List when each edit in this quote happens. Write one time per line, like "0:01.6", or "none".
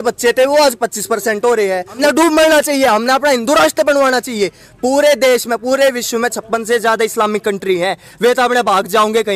0:01.9